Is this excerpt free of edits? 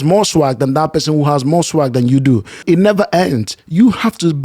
yes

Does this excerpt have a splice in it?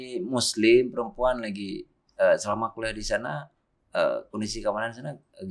no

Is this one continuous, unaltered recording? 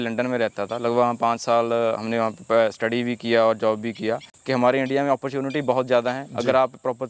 no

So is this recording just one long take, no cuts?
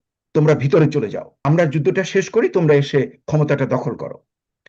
no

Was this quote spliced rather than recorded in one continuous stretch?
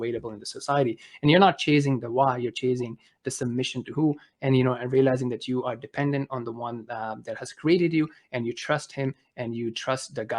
no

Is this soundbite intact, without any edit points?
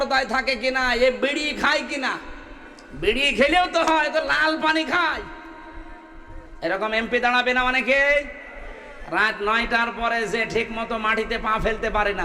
no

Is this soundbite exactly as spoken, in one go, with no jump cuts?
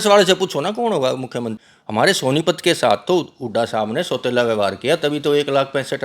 no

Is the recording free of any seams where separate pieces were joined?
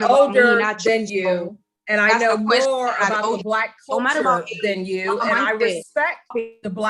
yes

